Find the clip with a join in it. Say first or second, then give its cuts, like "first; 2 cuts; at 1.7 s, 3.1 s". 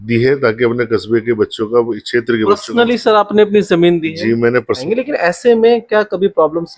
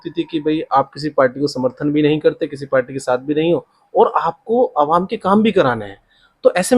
first; 1 cut; at 4.8 s